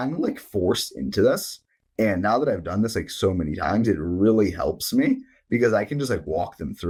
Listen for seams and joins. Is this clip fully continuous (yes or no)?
yes